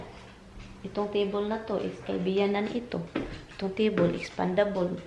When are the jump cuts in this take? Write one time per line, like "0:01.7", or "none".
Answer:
none